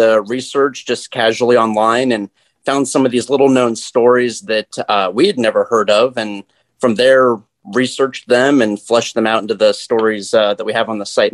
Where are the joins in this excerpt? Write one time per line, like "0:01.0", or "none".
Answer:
none